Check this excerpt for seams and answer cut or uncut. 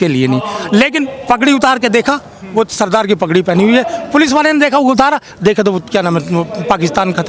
uncut